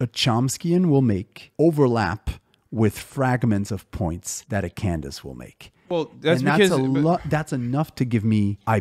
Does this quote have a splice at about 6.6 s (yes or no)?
no